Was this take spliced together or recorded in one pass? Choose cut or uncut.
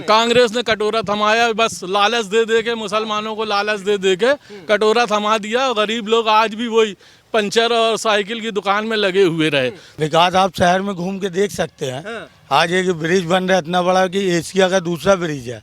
cut